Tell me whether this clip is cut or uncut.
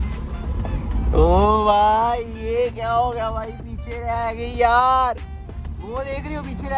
uncut